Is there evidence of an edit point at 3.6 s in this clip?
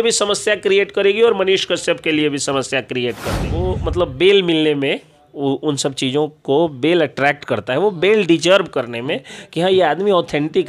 yes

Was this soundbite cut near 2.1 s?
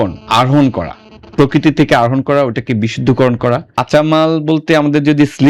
no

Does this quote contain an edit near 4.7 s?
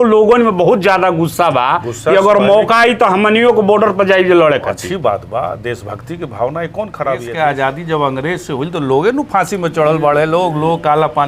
no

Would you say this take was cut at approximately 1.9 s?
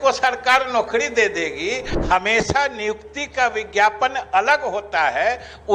yes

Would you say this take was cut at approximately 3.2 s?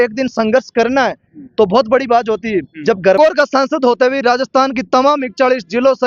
yes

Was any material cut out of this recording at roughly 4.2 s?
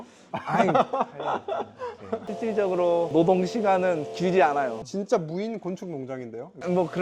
no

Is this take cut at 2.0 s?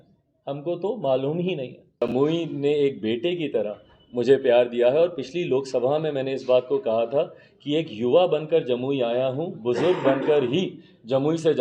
yes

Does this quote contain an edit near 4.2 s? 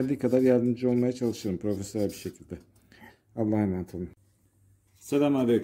yes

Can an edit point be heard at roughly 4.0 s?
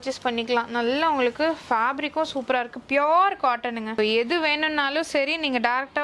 yes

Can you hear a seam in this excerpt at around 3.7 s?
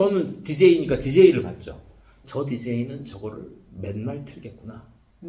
no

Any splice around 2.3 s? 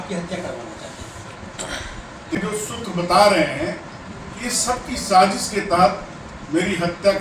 yes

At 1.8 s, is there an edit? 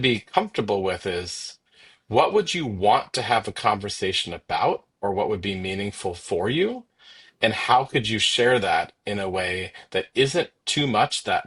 no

